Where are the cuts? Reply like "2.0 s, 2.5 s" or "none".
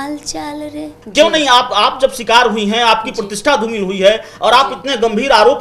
1.0 s